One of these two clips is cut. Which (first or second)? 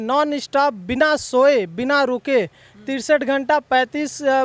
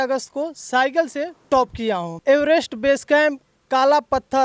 second